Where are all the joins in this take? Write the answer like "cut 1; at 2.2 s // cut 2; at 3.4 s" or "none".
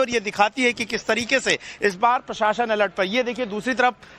cut 1; at 1.2 s